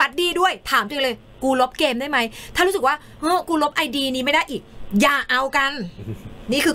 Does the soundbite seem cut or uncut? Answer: uncut